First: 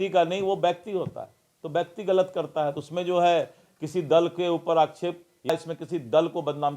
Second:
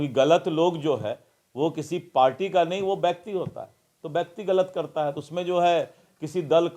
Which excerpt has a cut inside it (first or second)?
first